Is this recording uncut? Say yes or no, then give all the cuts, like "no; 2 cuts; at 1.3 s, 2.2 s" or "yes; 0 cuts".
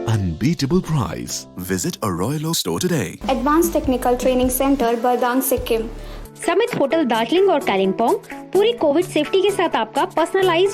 no; 2 cuts; at 3.1 s, 6.1 s